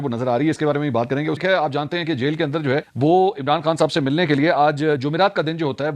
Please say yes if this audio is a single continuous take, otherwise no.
no